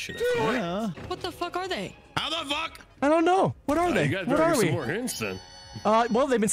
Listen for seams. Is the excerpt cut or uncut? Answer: cut